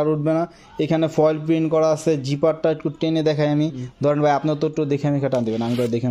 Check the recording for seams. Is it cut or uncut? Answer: uncut